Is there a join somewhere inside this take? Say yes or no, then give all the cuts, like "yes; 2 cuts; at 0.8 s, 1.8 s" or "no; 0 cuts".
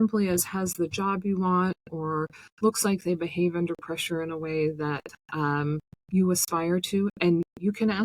no; 0 cuts